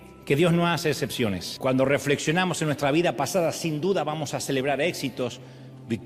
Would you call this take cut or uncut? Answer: cut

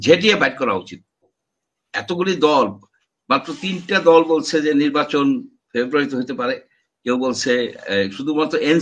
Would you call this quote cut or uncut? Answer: cut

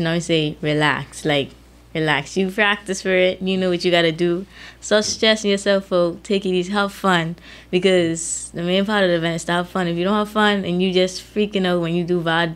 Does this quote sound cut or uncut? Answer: uncut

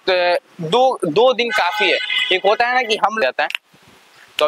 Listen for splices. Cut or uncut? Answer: cut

